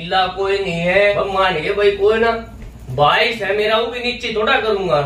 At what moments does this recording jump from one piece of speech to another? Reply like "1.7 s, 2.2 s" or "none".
1.1 s